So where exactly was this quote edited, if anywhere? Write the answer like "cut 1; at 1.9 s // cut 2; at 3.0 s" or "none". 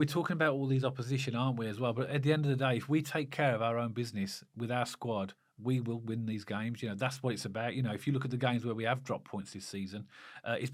none

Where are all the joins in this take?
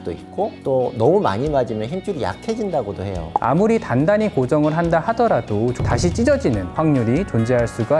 cut 1; at 3.2 s // cut 2; at 5.7 s

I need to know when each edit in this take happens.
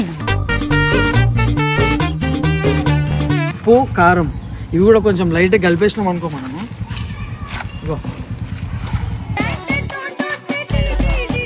cut 1; at 3.5 s

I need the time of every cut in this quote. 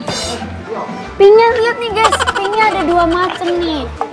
none

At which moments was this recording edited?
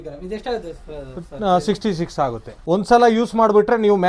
cut 1; at 2.5 s

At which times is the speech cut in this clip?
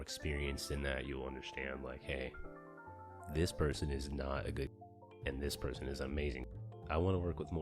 cut 1; at 5.1 s // cut 2; at 6.6 s

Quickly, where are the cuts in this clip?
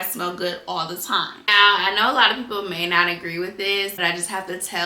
cut 1; at 1.4 s // cut 2; at 4.0 s

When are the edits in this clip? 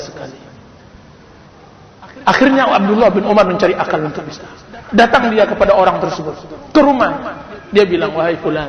none

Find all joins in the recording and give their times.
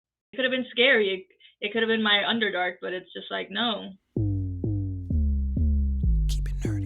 cut 1; at 4.0 s

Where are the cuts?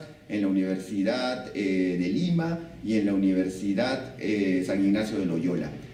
none

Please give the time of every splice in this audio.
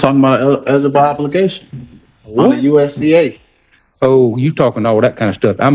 none

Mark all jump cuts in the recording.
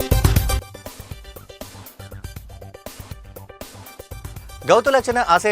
cut 1; at 4.6 s

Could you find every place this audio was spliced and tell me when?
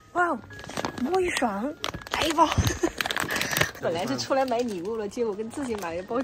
cut 1; at 3.8 s

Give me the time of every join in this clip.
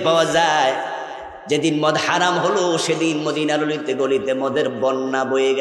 none

